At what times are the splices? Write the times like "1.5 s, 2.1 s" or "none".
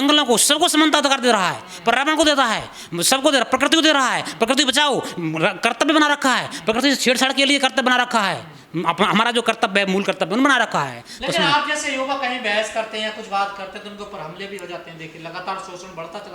none